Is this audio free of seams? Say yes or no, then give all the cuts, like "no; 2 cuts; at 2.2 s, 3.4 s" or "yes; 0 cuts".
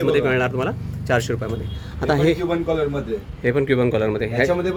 yes; 0 cuts